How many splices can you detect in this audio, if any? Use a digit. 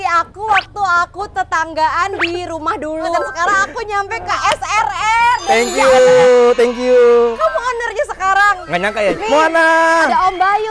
2